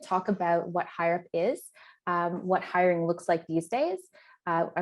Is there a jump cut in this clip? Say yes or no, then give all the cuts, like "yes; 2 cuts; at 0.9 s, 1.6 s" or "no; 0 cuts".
no; 0 cuts